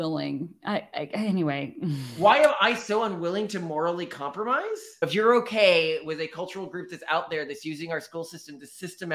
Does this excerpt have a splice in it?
yes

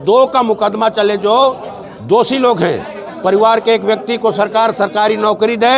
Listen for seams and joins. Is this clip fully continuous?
yes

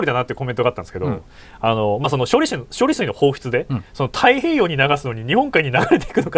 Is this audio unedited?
yes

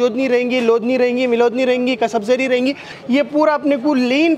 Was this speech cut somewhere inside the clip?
yes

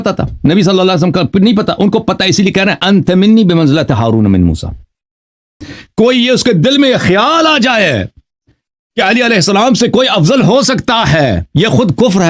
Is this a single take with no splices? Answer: no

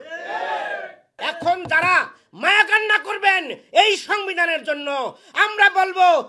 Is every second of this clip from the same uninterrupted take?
no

